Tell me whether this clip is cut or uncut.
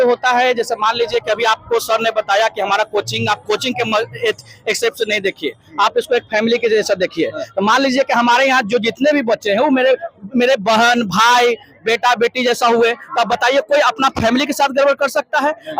uncut